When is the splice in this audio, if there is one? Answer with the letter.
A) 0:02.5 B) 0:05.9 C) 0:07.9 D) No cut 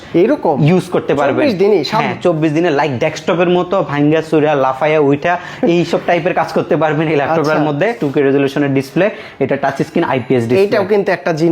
C